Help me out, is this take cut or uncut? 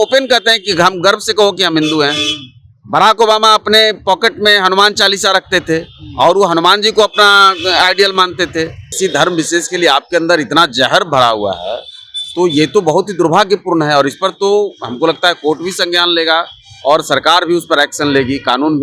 cut